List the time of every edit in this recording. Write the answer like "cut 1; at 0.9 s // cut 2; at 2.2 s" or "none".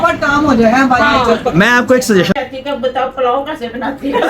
cut 1; at 2.4 s